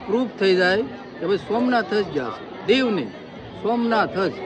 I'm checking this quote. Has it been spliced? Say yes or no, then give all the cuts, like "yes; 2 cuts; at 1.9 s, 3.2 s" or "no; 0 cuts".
no; 0 cuts